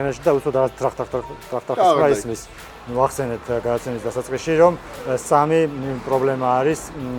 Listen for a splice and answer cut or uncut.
cut